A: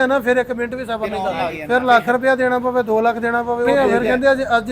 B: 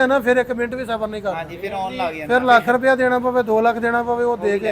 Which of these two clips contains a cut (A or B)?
A